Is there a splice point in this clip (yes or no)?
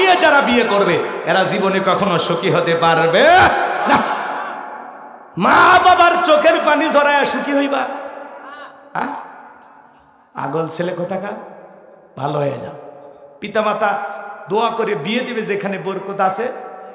no